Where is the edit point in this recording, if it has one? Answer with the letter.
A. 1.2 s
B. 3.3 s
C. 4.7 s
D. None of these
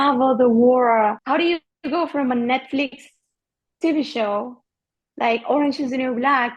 A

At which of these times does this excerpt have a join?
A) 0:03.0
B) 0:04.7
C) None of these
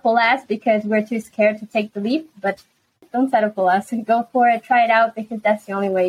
A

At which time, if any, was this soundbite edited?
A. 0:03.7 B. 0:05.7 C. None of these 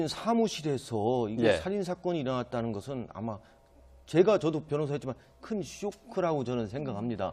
B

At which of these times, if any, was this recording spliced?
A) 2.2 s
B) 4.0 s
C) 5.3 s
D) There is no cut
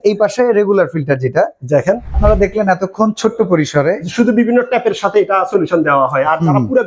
A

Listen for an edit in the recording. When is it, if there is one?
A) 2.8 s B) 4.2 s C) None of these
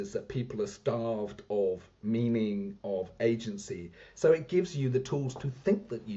C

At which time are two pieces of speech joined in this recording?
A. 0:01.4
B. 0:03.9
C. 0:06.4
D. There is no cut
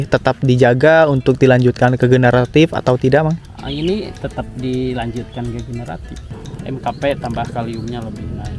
C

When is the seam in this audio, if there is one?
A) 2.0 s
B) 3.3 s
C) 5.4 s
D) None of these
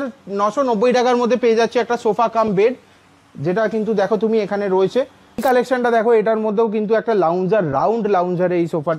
C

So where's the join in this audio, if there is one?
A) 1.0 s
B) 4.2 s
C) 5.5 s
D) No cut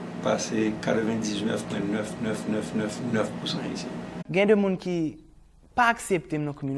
B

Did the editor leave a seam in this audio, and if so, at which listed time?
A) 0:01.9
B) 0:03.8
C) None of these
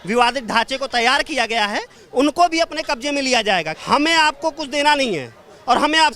B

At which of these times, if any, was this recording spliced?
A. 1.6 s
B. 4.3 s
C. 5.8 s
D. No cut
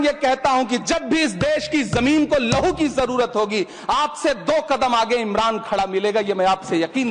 D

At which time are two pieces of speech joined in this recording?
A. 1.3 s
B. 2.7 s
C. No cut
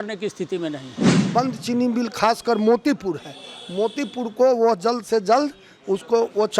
A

